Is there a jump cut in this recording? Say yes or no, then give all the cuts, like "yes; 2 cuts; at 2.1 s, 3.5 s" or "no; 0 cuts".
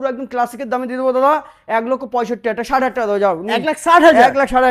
no; 0 cuts